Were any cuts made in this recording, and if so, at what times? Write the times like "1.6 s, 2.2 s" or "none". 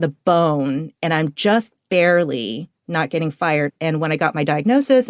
3.7 s